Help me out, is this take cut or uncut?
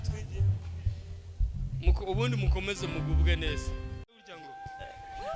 cut